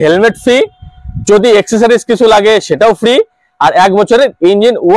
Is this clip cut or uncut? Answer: uncut